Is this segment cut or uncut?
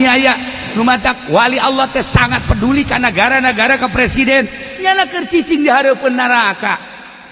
uncut